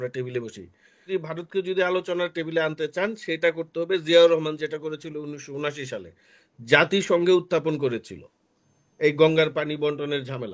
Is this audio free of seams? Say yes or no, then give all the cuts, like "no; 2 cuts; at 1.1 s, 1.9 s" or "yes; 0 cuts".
no; 1 cut; at 1.0 s